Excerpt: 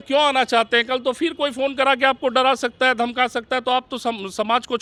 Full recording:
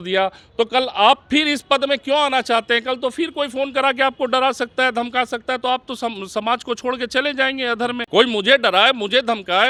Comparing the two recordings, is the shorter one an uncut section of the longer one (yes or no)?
yes